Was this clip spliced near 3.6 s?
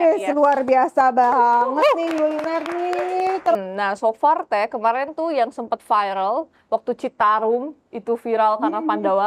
yes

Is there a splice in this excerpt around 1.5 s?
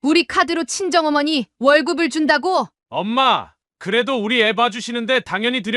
no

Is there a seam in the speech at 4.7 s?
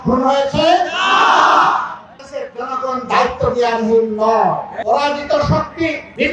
yes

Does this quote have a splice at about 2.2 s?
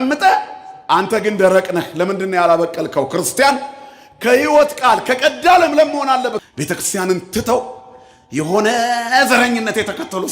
no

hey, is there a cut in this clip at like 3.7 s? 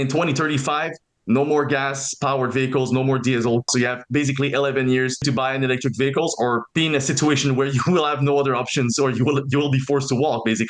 yes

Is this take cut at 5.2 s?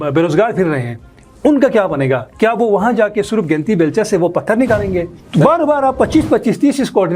yes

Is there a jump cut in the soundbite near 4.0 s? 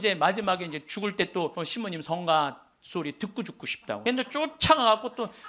yes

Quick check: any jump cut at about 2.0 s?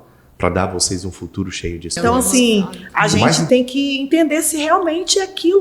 yes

